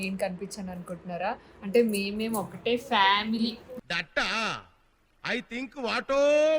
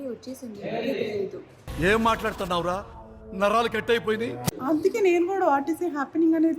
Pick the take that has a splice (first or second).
second